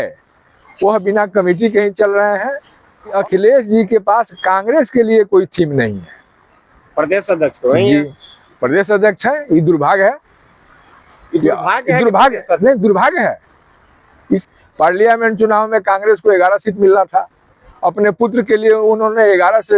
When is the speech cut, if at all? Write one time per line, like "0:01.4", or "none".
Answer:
0:03.1
0:14.4